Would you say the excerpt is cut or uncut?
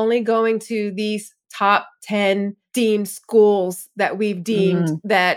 cut